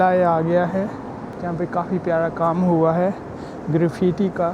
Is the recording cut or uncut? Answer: cut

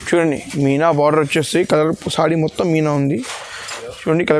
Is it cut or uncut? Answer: uncut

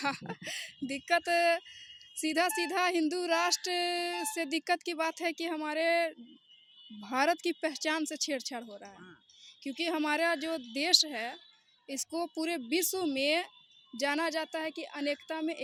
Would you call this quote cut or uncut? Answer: uncut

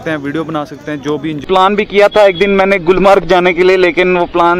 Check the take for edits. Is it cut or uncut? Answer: cut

